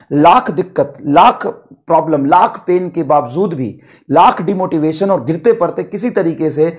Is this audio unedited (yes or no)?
yes